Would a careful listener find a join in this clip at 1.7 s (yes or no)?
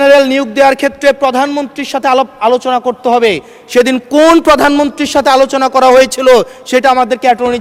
no